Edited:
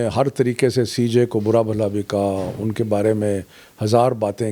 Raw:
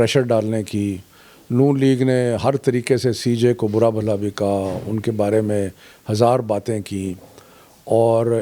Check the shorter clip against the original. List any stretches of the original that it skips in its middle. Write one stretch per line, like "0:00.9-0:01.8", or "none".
none